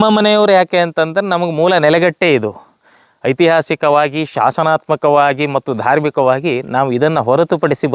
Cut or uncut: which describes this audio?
uncut